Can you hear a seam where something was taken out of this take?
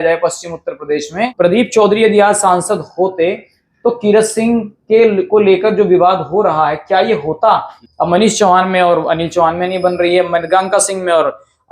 yes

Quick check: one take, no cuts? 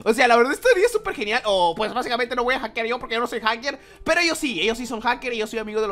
yes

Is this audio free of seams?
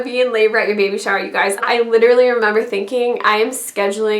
no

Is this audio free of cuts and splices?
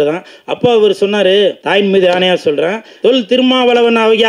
no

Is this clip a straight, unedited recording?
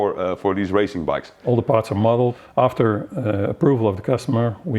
no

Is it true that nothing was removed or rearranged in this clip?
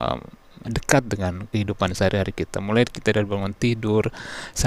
yes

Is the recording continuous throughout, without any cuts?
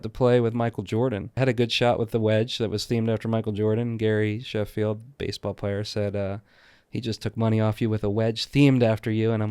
no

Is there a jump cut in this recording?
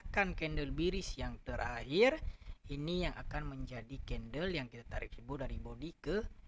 no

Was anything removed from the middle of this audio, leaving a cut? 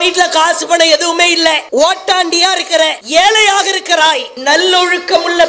yes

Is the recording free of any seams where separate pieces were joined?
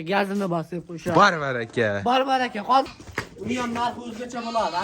no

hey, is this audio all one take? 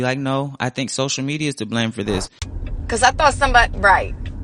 no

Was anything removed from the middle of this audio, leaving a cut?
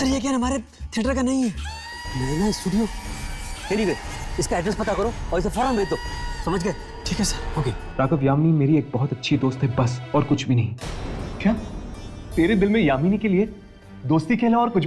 yes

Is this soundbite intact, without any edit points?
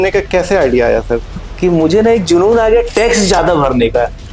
no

